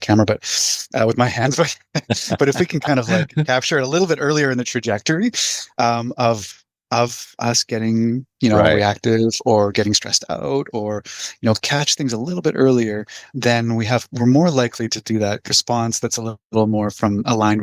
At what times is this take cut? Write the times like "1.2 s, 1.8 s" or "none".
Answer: 13.3 s, 15.5 s